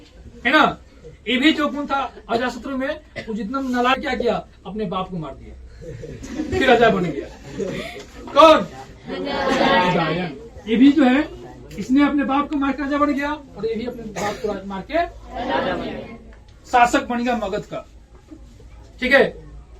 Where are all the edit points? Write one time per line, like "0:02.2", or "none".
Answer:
0:03.9